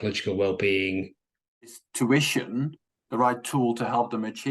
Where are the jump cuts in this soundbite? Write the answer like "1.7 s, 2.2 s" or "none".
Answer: 1.8 s